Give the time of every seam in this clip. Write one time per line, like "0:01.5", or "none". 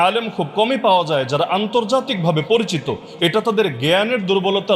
none